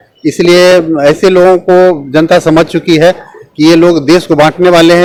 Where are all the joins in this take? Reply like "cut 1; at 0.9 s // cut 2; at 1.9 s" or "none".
none